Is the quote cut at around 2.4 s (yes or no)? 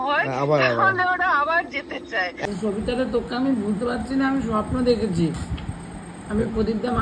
yes